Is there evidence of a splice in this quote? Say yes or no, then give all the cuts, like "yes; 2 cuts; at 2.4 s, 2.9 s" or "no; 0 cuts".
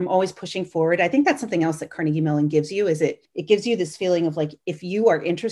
no; 0 cuts